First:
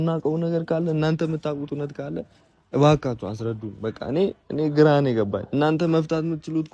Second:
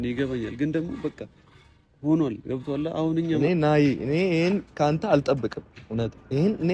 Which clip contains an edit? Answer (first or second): second